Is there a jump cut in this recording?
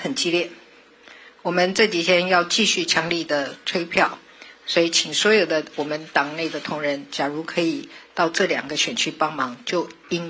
no; 0 cuts

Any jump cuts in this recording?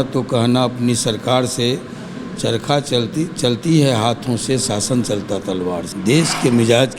yes; 1 cut; at 5.9 s

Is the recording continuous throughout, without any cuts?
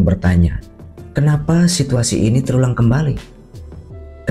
yes; 0 cuts

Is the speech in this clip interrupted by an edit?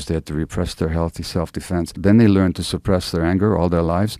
yes; 1 cut; at 1.9 s

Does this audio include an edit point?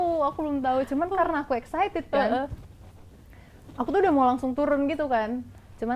no; 0 cuts

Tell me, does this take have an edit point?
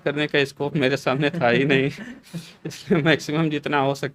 no; 0 cuts

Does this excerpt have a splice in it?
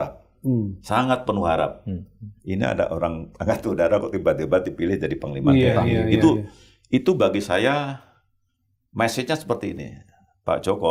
no; 0 cuts

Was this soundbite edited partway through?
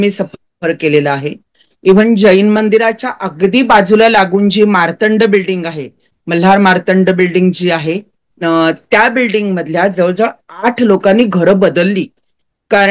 yes; 1 cut; at 1.7 s

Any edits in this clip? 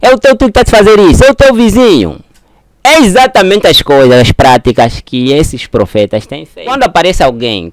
yes; 1 cut; at 6.7 s

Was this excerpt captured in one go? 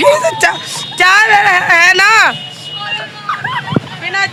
yes; 0 cuts

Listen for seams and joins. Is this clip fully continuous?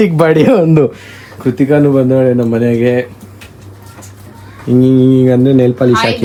yes; 0 cuts

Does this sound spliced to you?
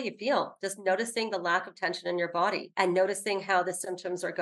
no; 0 cuts

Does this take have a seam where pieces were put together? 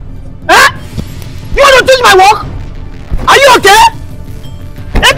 no; 0 cuts

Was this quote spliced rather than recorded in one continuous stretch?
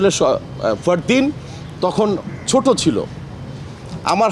no; 0 cuts

